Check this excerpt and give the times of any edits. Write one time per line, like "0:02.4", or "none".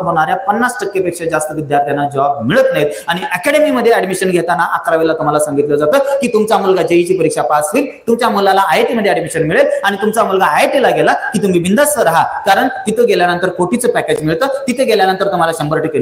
none